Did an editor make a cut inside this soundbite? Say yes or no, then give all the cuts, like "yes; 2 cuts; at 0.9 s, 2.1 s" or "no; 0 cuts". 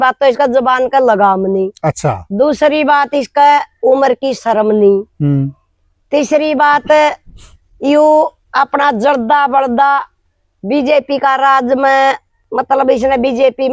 no; 0 cuts